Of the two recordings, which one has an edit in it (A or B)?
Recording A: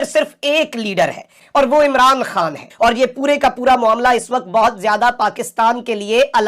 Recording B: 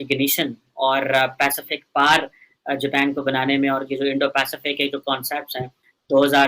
A